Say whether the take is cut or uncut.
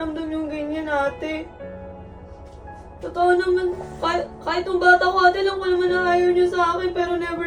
uncut